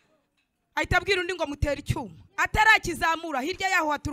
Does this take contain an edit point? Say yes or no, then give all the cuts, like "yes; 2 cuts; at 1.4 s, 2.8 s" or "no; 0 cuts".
no; 0 cuts